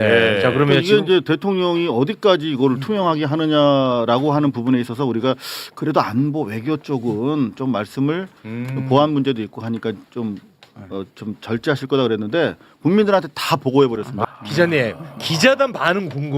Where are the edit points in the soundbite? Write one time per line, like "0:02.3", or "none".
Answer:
0:14.2